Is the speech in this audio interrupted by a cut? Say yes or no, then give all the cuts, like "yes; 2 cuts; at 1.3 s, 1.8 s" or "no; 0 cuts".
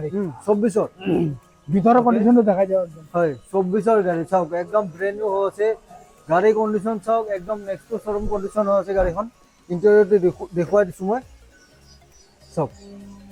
no; 0 cuts